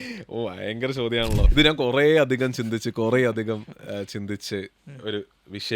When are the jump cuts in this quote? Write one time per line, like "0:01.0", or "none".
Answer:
0:01.5